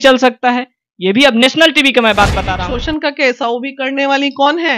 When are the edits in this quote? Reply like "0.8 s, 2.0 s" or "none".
2.5 s